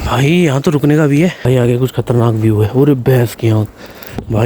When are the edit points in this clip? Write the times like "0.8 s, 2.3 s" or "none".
1.4 s